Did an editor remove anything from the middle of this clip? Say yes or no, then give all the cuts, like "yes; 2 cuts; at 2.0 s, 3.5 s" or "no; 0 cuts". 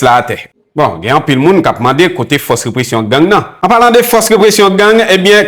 yes; 1 cut; at 3.5 s